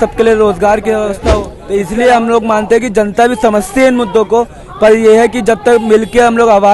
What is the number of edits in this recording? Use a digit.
1